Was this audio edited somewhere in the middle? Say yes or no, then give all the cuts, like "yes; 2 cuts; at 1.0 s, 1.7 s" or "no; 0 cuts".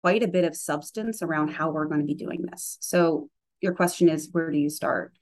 no; 0 cuts